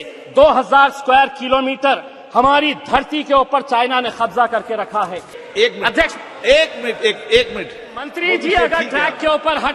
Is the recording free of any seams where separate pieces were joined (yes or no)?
no